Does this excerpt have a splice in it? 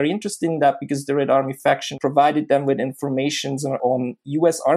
yes; 2 cuts; at 1.9 s, 3.8 s

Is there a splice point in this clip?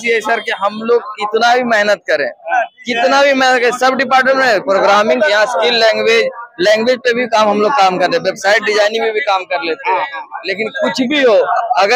no; 0 cuts

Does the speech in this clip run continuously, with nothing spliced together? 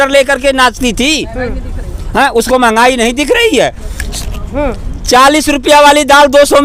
yes; 0 cuts

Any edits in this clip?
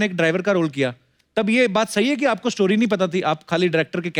no; 0 cuts

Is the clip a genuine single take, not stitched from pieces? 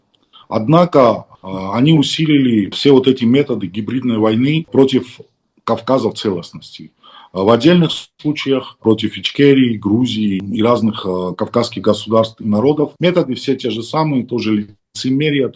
no; 4 cuts; at 2.7 s, 4.7 s, 8.8 s, 12.9 s

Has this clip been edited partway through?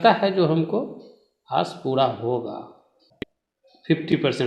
no; 0 cuts

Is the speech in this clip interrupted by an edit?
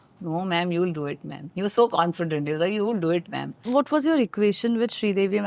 yes; 1 cut; at 3.6 s

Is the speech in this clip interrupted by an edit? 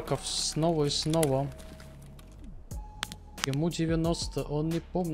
no; 0 cuts

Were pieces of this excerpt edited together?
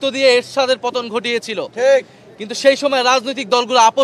no; 0 cuts

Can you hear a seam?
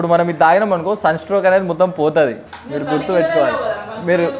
no; 0 cuts

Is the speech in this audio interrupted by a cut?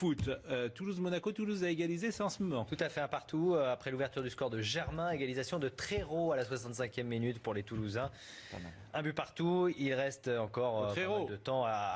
yes; 1 cut; at 10.4 s

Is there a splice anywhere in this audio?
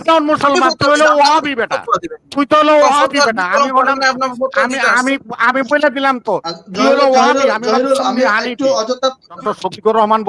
yes; 1 cut; at 9.4 s

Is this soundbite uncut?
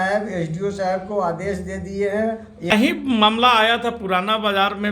no; 1 cut; at 2.7 s

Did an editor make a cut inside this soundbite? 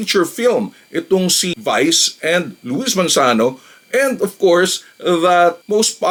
no; 0 cuts

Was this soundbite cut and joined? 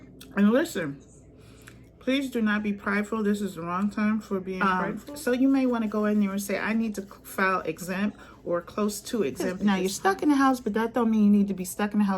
yes; 2 cuts; at 4.6 s, 9.4 s

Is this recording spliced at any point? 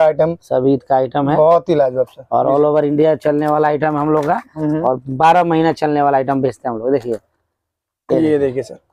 no; 0 cuts

